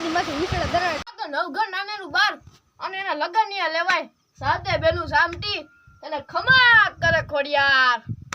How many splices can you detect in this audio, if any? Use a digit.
1